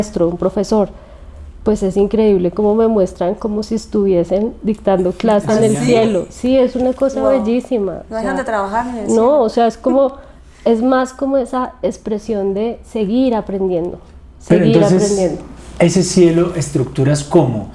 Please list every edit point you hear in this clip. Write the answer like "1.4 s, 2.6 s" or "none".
none